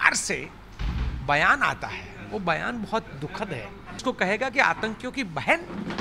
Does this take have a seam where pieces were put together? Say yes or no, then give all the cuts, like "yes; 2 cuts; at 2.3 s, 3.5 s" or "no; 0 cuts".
yes; 1 cut; at 4.0 s